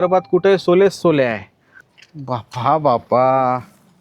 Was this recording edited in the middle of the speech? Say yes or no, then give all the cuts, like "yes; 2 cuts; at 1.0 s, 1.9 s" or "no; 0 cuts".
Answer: yes; 1 cut; at 2.3 s